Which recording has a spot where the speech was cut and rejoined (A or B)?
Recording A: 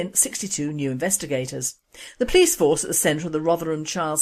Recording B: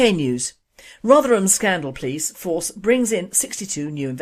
A